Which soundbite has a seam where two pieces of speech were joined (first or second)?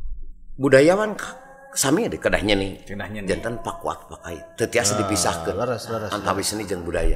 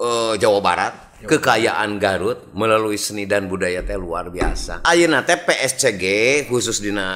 second